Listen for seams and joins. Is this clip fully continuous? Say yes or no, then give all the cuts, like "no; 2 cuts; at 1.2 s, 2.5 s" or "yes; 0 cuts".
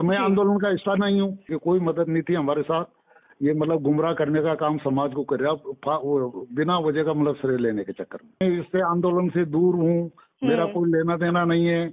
no; 2 cuts; at 1.5 s, 8.4 s